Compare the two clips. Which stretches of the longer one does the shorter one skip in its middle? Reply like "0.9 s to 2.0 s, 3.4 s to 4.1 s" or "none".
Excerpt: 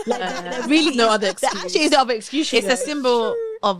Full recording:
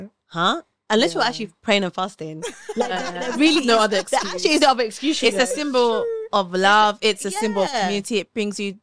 none